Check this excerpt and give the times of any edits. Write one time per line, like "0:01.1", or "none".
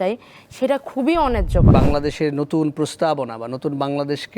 0:01.7